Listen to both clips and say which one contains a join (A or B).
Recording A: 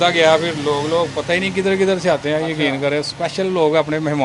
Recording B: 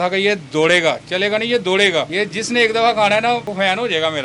B